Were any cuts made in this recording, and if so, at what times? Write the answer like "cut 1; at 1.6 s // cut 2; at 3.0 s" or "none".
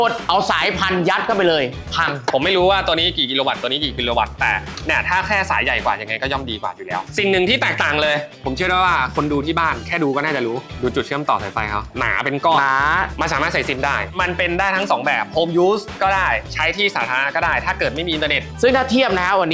cut 1; at 2.2 s // cut 2; at 7.1 s // cut 3; at 13.1 s // cut 4; at 18.5 s